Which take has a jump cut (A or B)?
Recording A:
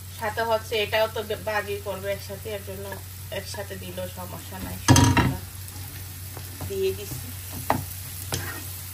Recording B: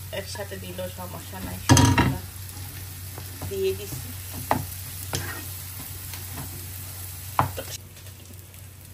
B